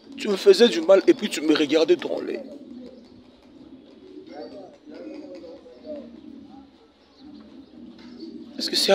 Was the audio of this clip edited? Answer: no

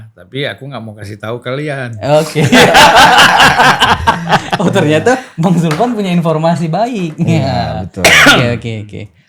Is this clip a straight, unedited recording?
yes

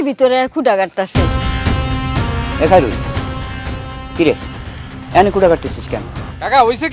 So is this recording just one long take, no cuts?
yes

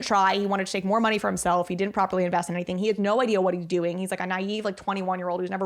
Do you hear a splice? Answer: no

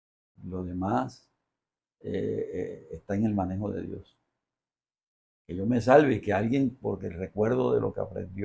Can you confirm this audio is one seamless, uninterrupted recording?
yes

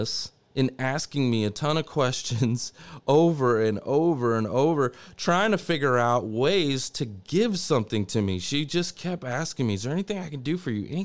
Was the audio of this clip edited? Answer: no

